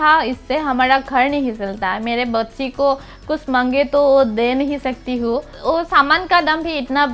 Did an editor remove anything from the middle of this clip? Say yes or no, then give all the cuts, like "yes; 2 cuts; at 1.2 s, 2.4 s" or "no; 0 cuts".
no; 0 cuts